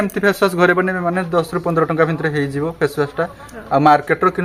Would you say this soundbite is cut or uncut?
uncut